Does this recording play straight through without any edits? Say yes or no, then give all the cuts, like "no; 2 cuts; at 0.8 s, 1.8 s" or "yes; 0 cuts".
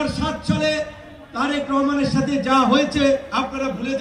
yes; 0 cuts